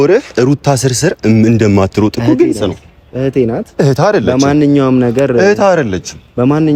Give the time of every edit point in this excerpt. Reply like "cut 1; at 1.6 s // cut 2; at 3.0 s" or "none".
none